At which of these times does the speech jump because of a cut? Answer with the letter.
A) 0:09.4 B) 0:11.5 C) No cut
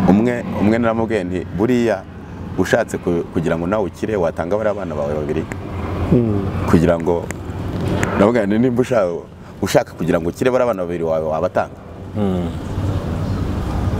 C